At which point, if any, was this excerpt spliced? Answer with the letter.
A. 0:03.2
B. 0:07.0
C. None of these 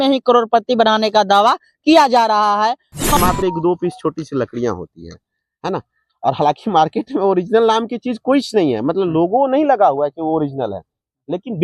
A